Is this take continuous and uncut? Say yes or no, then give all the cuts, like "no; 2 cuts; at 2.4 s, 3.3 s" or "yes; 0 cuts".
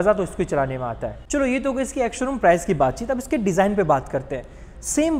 yes; 0 cuts